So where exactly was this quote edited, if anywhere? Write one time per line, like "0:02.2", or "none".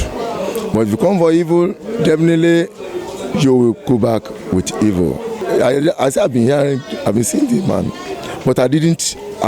0:05.4